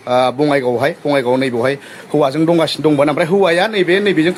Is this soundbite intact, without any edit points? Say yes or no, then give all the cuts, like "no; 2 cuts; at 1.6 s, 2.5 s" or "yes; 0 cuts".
yes; 0 cuts